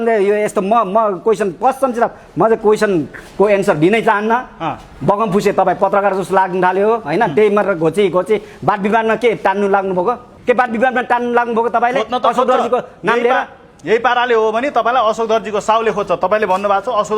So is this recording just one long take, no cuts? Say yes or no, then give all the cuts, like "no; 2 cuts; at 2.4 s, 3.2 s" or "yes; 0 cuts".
no; 1 cut; at 10.3 s